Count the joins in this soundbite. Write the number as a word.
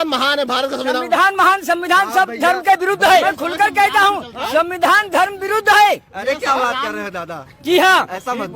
one